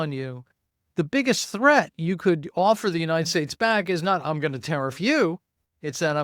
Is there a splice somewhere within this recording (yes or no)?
no